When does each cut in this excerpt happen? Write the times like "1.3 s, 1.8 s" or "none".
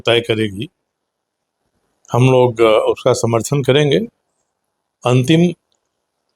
none